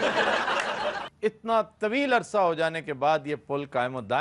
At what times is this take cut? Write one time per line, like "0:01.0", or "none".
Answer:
0:01.1

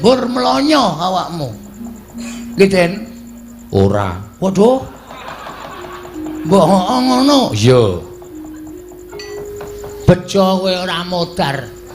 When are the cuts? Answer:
0:09.4

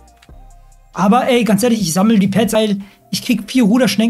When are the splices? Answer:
0:02.5

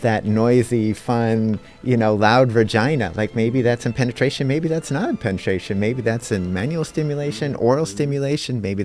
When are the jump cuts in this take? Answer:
none

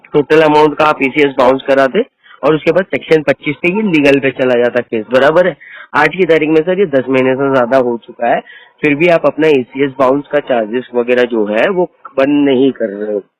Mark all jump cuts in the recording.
none

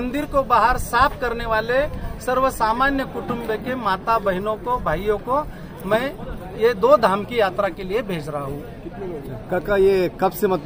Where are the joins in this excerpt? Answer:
none

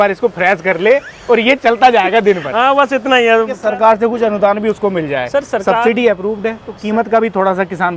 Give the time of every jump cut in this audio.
0:03.6
0:06.8

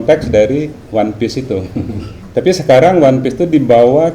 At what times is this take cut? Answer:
0:02.1

